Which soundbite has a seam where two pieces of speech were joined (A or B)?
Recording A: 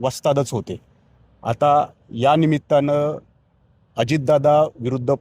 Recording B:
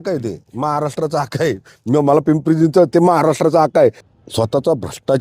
B